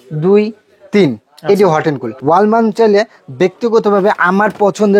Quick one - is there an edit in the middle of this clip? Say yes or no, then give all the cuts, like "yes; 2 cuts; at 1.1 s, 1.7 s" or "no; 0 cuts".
yes; 1 cut; at 2.1 s